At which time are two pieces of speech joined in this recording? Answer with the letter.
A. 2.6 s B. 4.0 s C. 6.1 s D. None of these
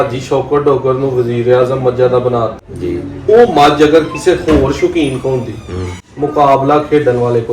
A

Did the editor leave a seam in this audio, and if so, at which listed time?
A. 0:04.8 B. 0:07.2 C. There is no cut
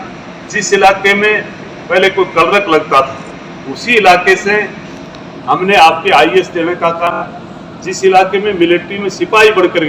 B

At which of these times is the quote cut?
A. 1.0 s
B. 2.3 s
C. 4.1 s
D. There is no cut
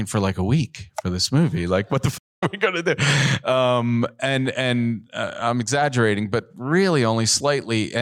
D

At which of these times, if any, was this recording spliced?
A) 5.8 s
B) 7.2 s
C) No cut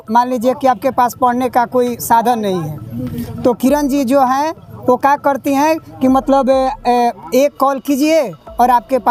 C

